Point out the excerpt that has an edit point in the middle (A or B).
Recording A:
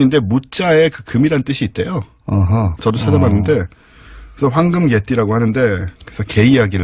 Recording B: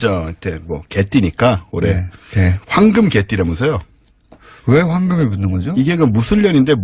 B